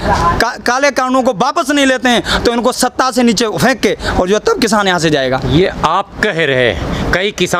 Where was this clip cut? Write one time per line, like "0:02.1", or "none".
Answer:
none